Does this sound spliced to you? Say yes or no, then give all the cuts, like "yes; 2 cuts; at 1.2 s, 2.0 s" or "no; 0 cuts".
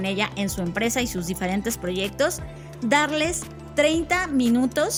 no; 0 cuts